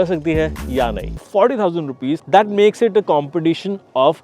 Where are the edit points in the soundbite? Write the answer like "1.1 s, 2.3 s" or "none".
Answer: 1.3 s